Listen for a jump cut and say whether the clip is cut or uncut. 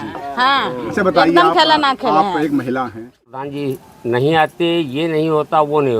cut